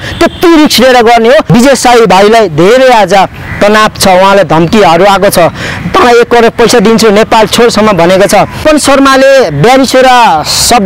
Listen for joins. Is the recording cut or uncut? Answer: cut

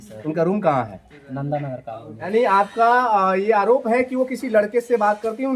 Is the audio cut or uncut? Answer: cut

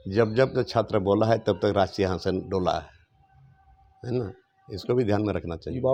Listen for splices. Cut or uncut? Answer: uncut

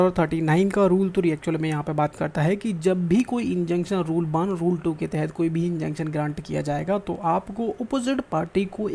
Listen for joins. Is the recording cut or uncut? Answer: uncut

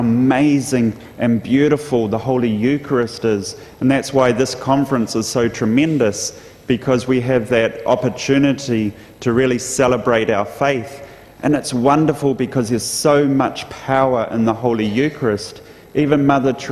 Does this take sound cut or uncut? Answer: cut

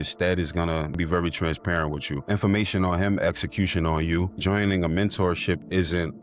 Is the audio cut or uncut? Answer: cut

